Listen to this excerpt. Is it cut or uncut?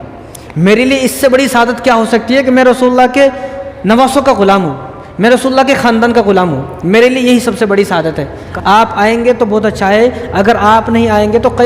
cut